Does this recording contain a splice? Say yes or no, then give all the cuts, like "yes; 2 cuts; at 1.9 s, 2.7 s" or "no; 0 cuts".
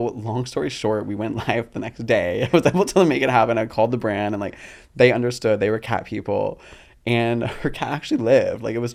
no; 0 cuts